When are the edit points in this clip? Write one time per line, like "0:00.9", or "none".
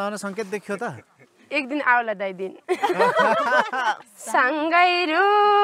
0:04.0